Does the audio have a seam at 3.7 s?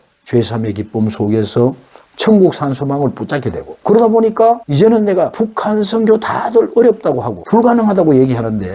yes; 4 cuts; at 3.7 s, 4.7 s, 5.3 s, 7.3 s

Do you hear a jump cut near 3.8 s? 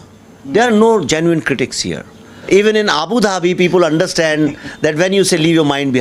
no; 1 cut; at 2.5 s

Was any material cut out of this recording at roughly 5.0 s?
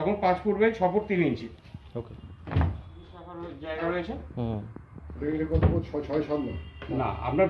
no; 1 cut; at 3.3 s

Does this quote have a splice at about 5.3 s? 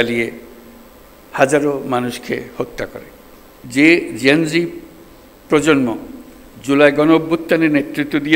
no; 1 cut; at 3.5 s

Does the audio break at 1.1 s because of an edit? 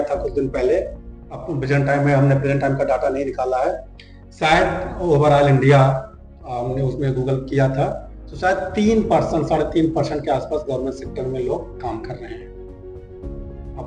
no; 0 cuts

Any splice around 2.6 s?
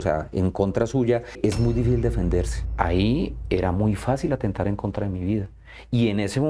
yes; 2 cuts; at 1.4 s, 2.6 s

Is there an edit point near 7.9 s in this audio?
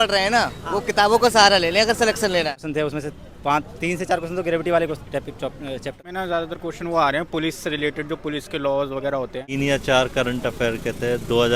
no; 3 cuts; at 2.6 s, 6.0 s, 9.5 s

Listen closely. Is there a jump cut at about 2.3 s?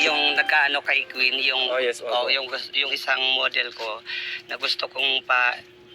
no; 1 cut; at 4.1 s

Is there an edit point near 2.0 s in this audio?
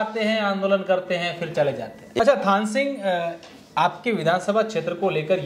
yes; 1 cut; at 2.0 s

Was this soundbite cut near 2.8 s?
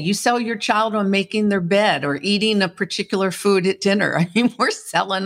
no; 0 cuts

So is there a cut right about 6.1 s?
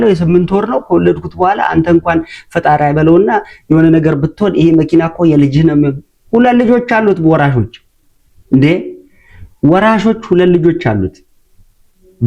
no; 0 cuts

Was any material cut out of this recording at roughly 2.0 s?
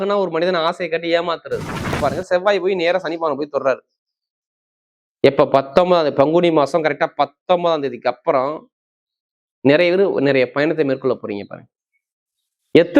yes; 1 cut; at 2.0 s

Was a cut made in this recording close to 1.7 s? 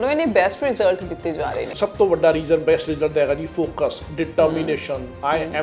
yes; 1 cut; at 1.7 s

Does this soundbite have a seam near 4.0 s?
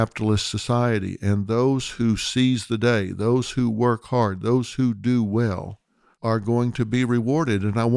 no; 0 cuts

